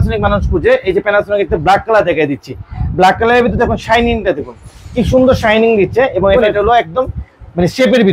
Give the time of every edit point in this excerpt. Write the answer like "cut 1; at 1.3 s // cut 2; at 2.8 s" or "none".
cut 1; at 6.5 s